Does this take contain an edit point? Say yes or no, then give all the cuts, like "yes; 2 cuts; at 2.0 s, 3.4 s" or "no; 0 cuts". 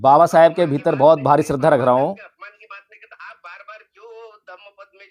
no; 0 cuts